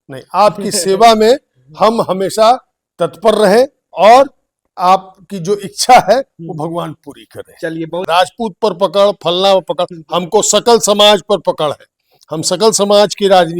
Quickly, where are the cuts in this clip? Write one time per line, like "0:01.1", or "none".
0:08.0